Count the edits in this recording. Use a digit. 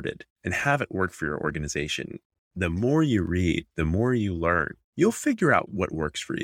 2